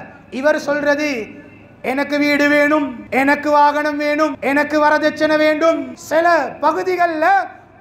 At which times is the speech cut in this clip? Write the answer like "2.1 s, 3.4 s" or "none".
3.0 s, 4.4 s, 5.9 s